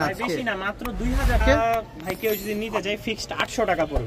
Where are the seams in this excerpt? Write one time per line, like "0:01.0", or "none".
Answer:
0:01.4